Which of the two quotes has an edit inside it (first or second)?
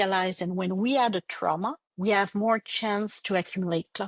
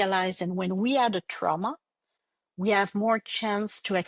first